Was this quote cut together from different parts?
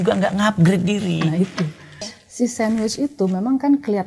yes; 1 cut; at 1.8 s

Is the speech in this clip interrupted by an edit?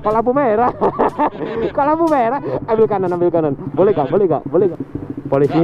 yes; 1 cut; at 4.7 s

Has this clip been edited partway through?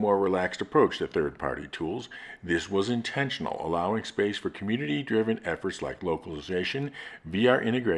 no; 0 cuts

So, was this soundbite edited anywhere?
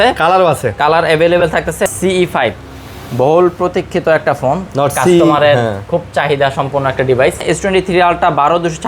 yes; 2 cuts; at 1.9 s, 7.4 s

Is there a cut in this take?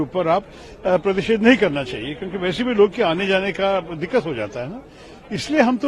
no; 0 cuts

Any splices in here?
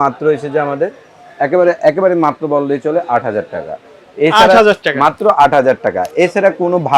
no; 0 cuts

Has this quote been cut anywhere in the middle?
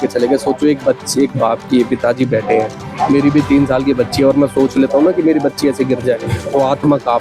no; 0 cuts

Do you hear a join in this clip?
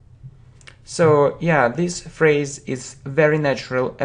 yes; 1 cut; at 2.6 s

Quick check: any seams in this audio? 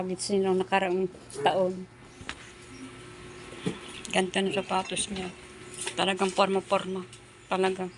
no; 0 cuts

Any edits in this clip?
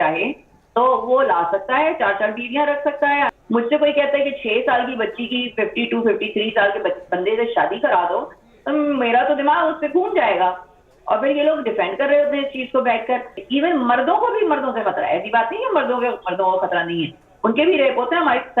yes; 2 cuts; at 3.3 s, 13.4 s

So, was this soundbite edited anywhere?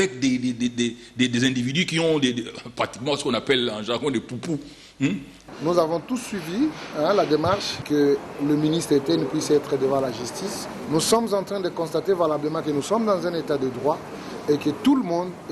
yes; 1 cut; at 5.3 s

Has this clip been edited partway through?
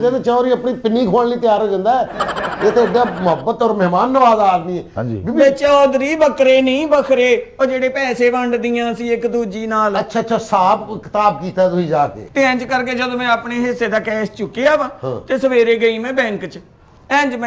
no; 0 cuts

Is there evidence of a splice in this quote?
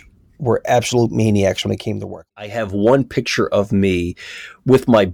yes; 1 cut; at 2.4 s

